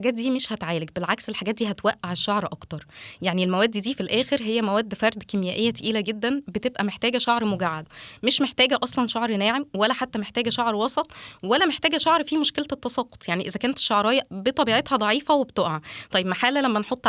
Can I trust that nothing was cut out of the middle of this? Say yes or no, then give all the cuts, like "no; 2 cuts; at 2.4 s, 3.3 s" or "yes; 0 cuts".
yes; 0 cuts